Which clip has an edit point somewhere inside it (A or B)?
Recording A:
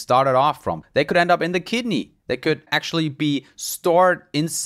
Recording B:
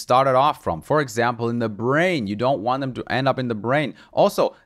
A